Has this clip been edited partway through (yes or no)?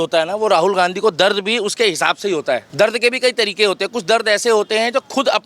yes